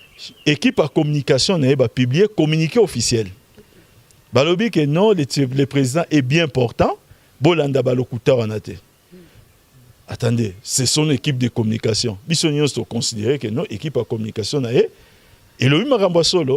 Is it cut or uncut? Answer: uncut